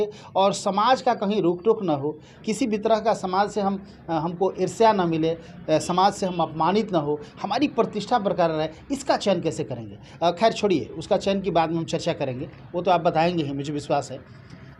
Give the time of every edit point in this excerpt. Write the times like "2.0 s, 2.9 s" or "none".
none